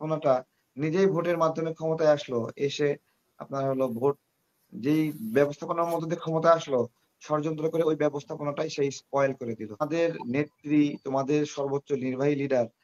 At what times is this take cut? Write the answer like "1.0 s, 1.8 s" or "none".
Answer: 9.8 s